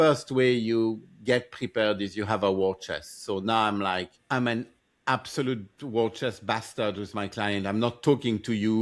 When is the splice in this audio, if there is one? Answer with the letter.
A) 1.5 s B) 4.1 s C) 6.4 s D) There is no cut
B